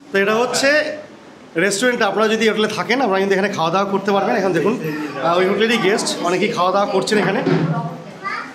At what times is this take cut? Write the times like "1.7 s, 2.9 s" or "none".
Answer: none